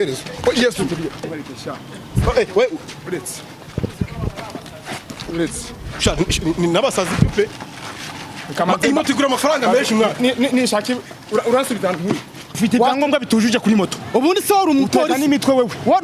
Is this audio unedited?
no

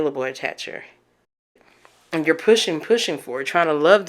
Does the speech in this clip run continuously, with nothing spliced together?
no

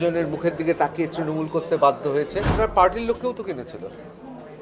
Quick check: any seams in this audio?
yes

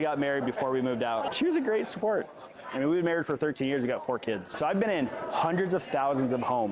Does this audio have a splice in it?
yes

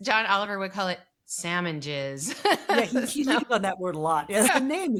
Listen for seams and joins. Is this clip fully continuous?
yes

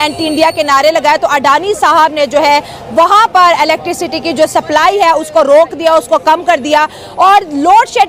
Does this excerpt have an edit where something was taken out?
no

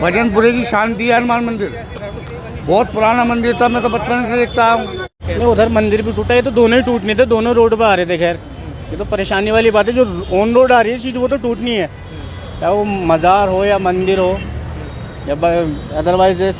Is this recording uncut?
no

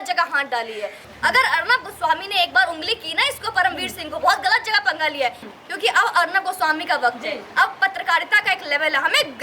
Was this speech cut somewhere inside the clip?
yes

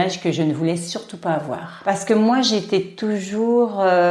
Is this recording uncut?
no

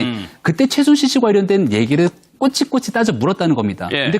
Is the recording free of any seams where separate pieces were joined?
no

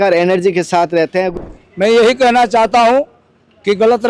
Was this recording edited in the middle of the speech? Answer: yes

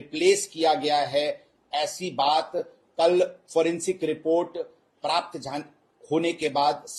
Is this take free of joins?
yes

